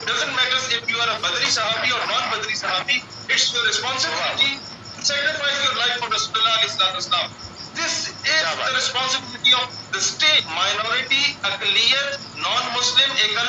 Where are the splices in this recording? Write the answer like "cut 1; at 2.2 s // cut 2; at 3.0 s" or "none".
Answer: cut 1; at 10.4 s

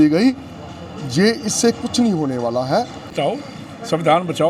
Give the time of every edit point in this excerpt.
cut 1; at 3.1 s

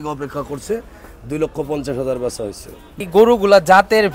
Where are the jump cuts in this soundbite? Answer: cut 1; at 3.0 s

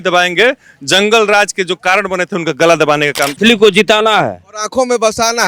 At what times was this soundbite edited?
cut 1; at 3.3 s

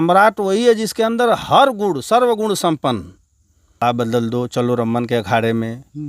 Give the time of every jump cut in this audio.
cut 1; at 3.8 s

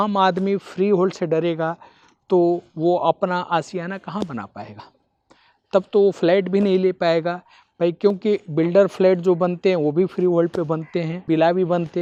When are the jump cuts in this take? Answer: none

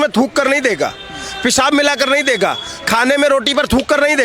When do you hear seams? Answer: none

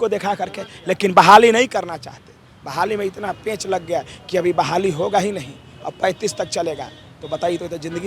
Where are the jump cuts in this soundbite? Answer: none

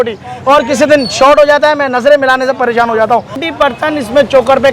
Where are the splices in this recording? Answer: cut 1; at 3.4 s

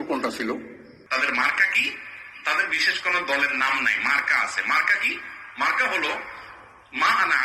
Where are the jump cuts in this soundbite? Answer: cut 1; at 0.9 s

